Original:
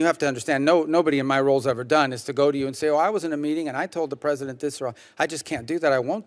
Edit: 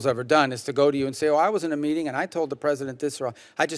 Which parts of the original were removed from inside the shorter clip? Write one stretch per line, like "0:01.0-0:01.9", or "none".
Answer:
none